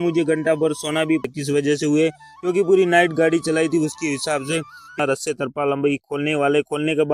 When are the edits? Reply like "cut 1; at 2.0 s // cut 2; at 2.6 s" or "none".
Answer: cut 1; at 1.3 s // cut 2; at 5.0 s